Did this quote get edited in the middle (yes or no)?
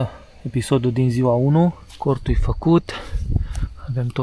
yes